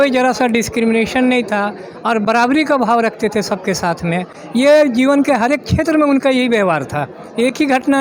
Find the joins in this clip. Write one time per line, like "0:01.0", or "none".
none